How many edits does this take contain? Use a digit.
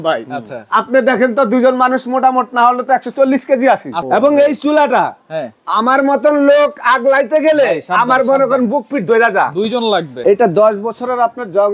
2